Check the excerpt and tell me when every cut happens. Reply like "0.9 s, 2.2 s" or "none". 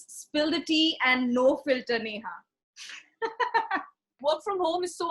4.2 s